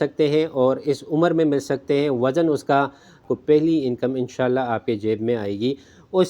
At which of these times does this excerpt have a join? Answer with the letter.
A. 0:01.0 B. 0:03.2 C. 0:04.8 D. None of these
B